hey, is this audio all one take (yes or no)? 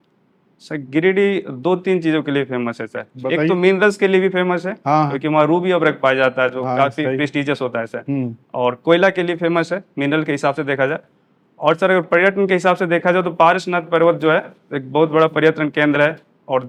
yes